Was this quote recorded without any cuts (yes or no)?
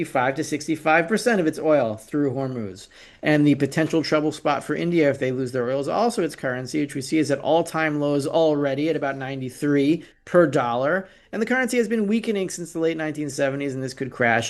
yes